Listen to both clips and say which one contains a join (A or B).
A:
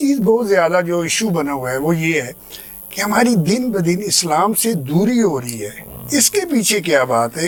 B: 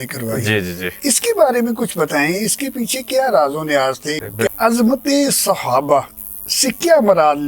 B